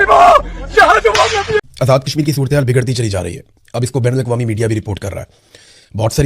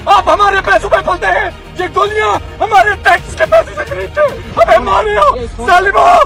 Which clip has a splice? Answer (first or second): first